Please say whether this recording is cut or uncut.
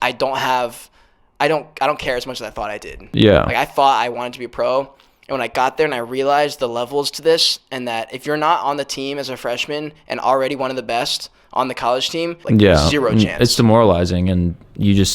cut